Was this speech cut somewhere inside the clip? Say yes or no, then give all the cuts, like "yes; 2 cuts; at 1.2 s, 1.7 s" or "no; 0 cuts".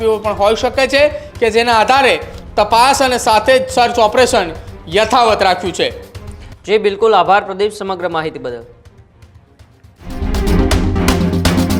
no; 0 cuts